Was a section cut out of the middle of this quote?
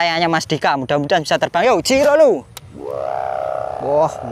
no; 0 cuts

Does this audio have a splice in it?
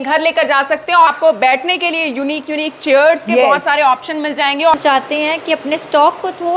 yes; 2 cuts; at 1.1 s, 4.7 s

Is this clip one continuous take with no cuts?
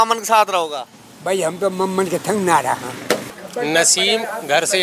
no; 1 cut; at 3.3 s

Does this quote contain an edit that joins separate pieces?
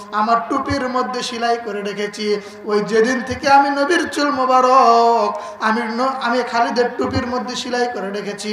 no; 0 cuts

